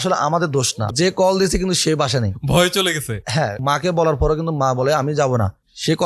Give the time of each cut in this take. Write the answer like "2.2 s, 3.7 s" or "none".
0.9 s, 2.4 s, 3.6 s